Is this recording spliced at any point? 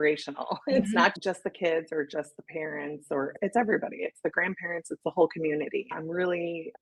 no; 0 cuts

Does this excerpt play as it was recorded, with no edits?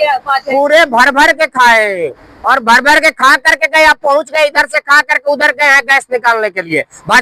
yes; 0 cuts

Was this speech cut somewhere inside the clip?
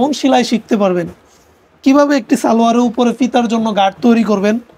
no; 0 cuts

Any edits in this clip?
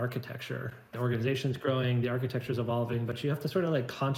yes; 1 cut; at 0.9 s

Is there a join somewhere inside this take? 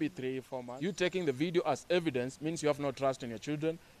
yes; 1 cut; at 1.0 s

